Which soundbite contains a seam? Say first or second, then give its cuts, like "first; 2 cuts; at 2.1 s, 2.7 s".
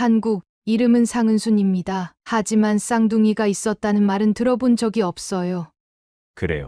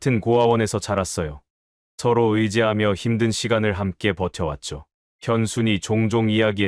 first; 1 cut; at 5.8 s